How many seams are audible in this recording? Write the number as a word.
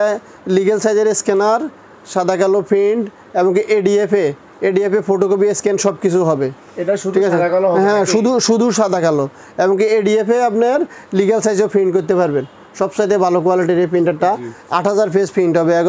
zero